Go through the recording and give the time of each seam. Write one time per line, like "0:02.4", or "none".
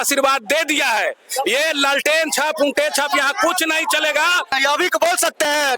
0:04.5